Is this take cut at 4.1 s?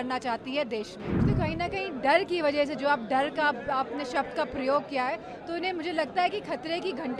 no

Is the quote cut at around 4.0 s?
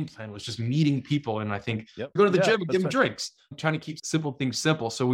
yes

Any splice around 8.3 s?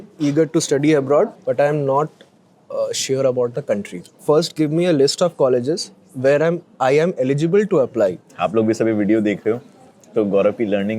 yes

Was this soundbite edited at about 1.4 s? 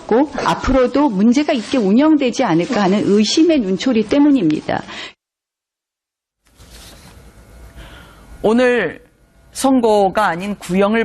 yes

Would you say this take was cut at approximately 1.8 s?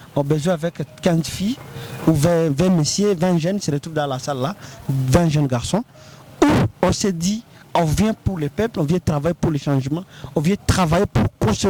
no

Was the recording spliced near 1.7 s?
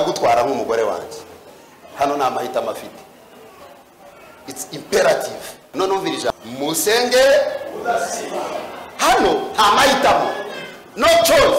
no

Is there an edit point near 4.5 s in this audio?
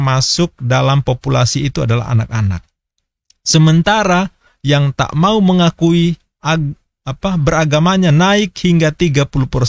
no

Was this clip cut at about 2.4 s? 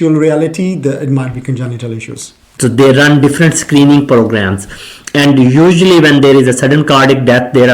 yes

